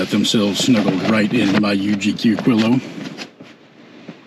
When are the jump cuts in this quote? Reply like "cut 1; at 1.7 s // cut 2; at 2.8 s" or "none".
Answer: none